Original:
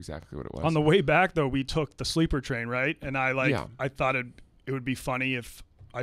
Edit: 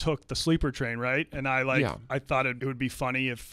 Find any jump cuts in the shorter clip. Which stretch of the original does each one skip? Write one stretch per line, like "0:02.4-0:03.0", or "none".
0:04.2-0:04.6